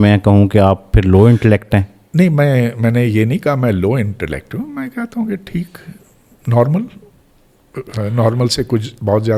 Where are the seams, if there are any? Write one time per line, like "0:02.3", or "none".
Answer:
none